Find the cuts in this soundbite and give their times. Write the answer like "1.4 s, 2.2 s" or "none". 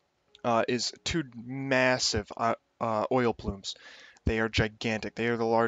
none